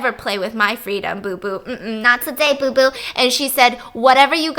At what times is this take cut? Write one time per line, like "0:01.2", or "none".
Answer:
none

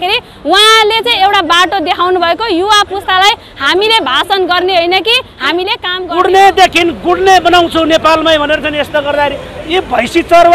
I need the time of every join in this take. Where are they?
0:05.9

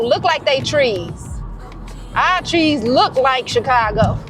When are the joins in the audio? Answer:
none

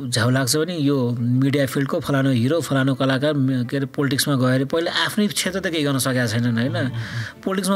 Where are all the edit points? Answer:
none

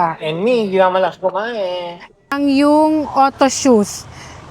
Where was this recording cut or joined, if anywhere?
0:02.3

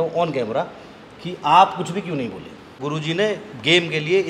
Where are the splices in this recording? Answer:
0:02.7

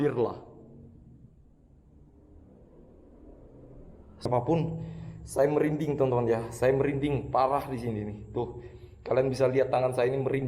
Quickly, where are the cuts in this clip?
0:04.3

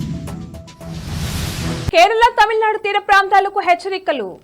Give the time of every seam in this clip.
none

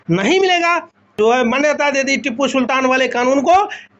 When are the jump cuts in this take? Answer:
0:01.1

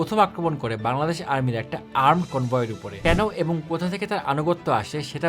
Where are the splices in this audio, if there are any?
0:02.8

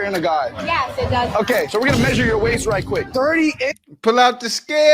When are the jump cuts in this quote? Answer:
none

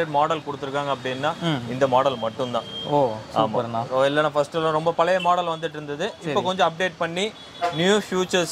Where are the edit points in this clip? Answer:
none

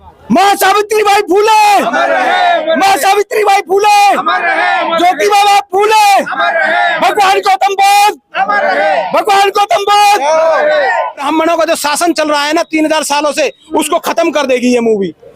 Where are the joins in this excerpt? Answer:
0:11.2

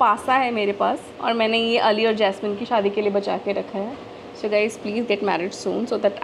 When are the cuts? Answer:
0:01.1
0:02.6

